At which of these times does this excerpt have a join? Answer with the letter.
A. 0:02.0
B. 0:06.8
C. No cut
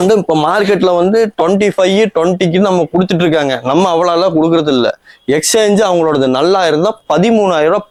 C